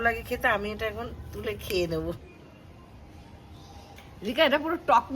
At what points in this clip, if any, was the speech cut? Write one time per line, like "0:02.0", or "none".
0:02.2
0:04.0